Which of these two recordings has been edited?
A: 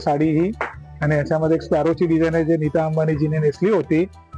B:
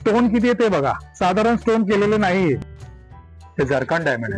B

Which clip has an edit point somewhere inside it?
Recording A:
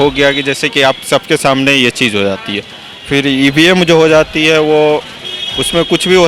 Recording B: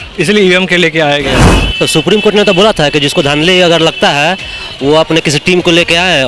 B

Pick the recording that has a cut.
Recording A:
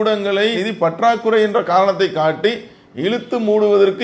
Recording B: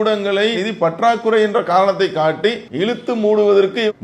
B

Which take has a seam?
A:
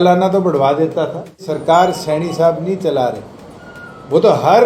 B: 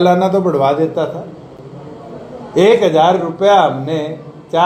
A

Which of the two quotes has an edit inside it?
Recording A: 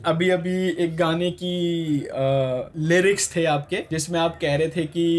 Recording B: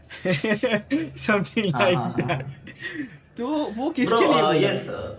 A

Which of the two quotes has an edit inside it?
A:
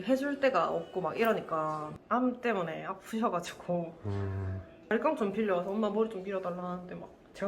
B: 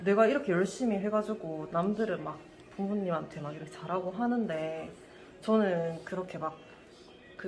A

